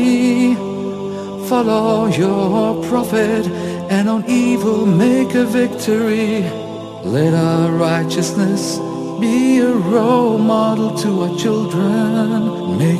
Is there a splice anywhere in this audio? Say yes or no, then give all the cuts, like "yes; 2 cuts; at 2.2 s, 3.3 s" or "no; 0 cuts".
no; 0 cuts